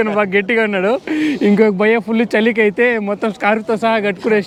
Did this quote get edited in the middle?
no; 0 cuts

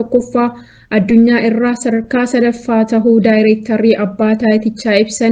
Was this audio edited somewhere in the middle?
no; 0 cuts

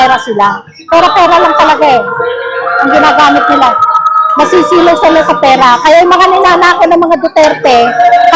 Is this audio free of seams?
yes; 0 cuts

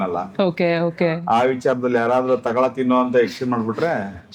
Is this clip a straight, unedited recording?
yes; 0 cuts

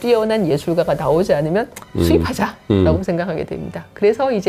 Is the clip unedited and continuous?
yes; 0 cuts

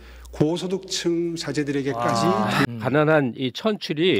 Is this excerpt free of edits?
no; 1 cut; at 2.7 s

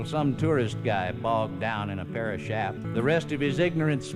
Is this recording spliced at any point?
yes; 1 cut; at 2.8 s

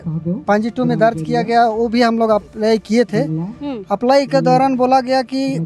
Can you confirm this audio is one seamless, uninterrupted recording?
yes; 0 cuts

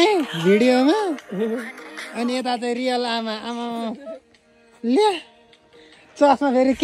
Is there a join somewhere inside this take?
no; 0 cuts

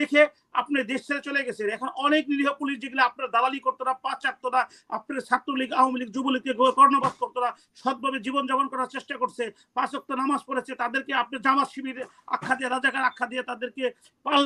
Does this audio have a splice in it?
no; 0 cuts

